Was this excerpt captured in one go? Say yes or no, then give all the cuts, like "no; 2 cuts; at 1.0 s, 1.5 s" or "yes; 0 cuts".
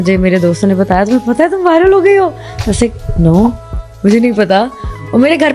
yes; 0 cuts